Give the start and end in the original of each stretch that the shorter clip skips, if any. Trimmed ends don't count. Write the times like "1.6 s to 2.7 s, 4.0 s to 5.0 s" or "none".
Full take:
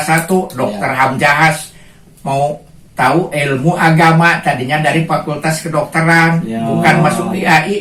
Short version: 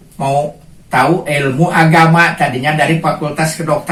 none